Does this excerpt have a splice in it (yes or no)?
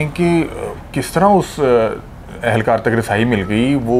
no